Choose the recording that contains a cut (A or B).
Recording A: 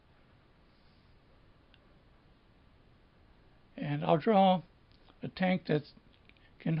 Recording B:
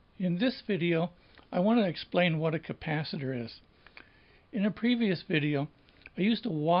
A